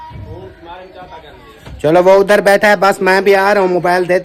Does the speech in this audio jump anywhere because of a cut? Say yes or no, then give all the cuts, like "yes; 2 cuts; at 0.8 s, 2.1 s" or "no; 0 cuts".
no; 0 cuts